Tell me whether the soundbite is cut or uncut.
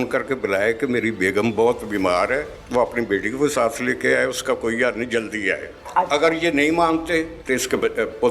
cut